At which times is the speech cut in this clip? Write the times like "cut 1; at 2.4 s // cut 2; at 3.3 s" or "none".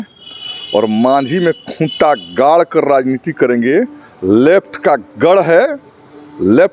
none